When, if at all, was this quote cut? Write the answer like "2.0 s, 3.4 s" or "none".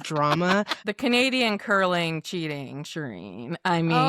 0.9 s

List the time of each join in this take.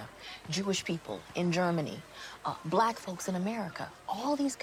none

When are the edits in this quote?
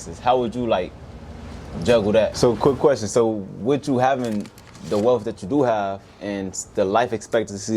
2.3 s

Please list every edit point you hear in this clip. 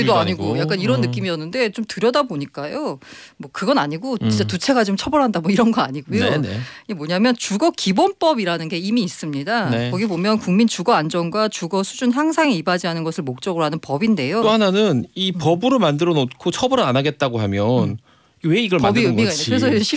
14.4 s

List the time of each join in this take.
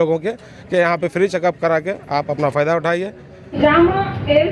3.6 s

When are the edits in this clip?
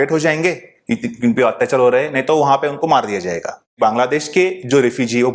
3.8 s

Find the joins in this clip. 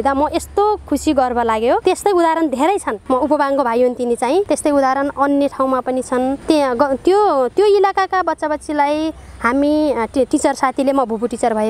none

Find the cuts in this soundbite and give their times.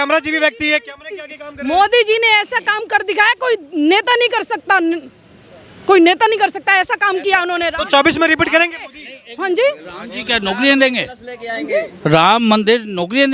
none

